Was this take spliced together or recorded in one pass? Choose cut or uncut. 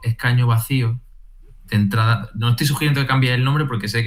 uncut